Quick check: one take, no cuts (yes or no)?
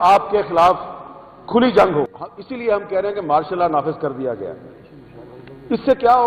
no